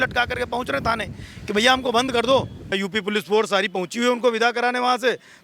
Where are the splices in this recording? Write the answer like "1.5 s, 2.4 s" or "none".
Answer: 2.8 s

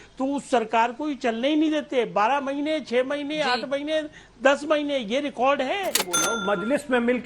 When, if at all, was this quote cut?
6.2 s

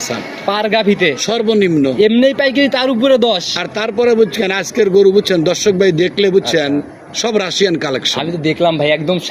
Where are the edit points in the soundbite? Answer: none

